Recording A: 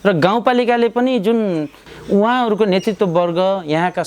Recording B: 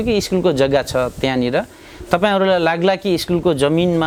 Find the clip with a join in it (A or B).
A